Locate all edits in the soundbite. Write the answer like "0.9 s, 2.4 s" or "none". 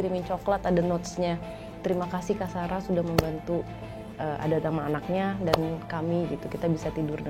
none